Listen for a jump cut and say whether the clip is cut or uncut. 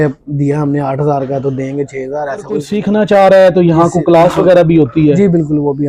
cut